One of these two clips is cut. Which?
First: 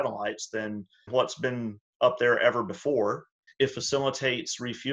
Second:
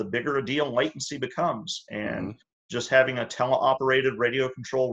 first; 2 cuts; at 1.1 s, 3.4 s

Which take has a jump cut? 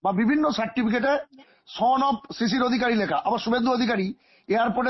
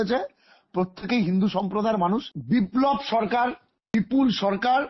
second; 2 cuts; at 2.3 s, 3.8 s

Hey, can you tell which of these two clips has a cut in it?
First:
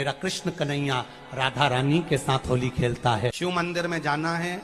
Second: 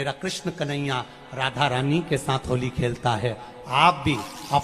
first; 1 cut; at 3.4 s

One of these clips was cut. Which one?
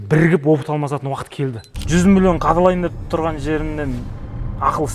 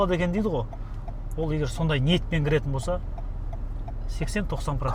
first; 1 cut; at 1.7 s

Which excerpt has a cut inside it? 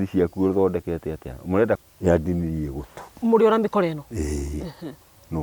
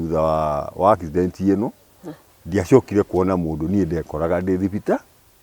first; 1 cut; at 1.8 s

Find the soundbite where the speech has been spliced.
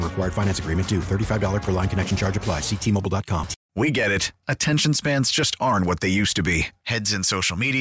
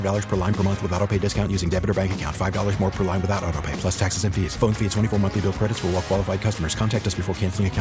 first; 1 cut; at 3.6 s

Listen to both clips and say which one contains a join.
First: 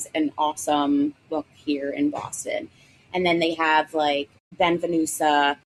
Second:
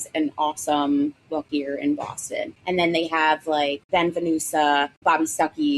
second; 4 cuts; at 1.5 s, 2.6 s, 3.8 s, 4.9 s

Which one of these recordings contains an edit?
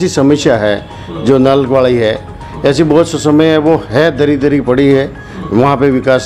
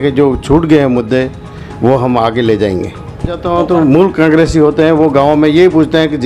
second; 1 cut; at 3.4 s

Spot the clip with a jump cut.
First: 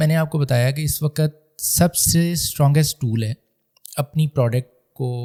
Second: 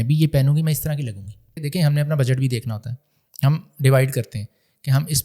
second; 1 cut; at 1.6 s

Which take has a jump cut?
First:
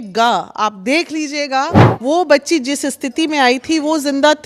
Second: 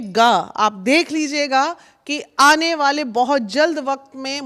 first; 1 cut; at 1.8 s

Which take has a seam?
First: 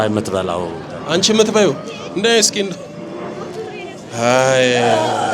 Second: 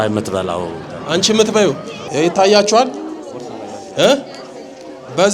second; 1 cut; at 1.9 s

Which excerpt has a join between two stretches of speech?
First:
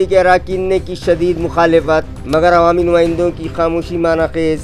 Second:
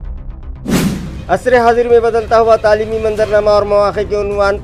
second; 1 cut; at 1.1 s

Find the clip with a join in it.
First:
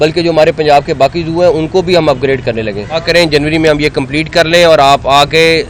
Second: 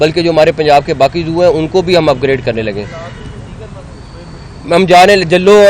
first; 1 cut; at 3.0 s

